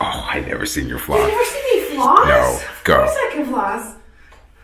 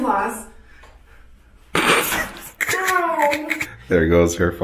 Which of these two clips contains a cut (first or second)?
second